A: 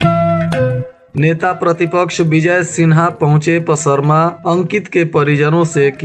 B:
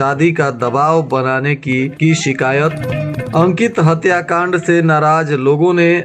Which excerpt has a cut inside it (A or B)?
A